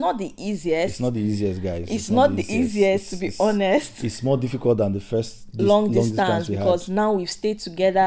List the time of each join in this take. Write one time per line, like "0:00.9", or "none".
none